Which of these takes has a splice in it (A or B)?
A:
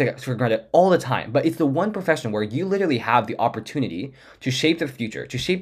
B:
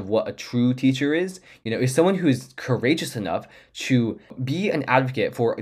B